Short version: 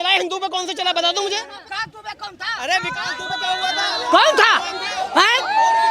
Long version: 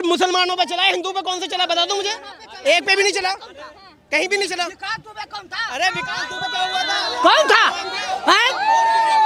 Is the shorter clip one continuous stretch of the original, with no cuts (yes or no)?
no